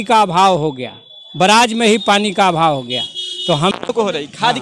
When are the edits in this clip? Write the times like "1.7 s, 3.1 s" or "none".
3.7 s